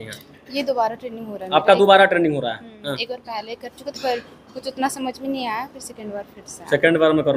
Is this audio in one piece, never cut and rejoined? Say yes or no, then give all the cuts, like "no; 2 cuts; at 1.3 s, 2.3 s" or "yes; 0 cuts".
yes; 0 cuts